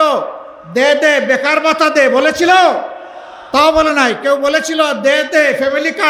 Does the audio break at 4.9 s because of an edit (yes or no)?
no